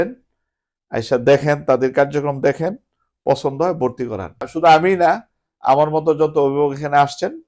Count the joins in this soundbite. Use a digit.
1